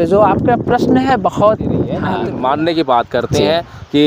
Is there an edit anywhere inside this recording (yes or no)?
yes